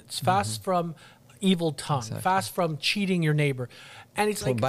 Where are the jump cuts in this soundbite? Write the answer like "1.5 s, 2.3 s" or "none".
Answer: none